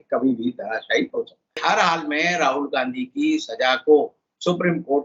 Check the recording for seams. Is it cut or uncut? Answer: cut